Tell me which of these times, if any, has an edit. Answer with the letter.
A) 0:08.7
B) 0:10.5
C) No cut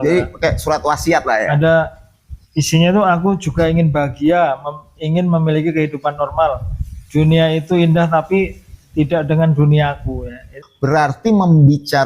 B